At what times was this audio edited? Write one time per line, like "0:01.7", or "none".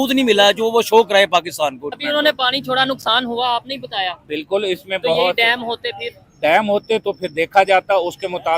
0:02.0